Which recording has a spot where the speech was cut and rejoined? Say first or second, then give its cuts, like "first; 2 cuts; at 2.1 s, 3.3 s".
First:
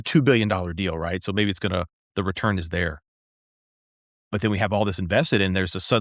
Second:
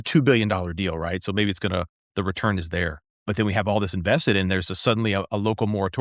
second; 1 cut; at 3.1 s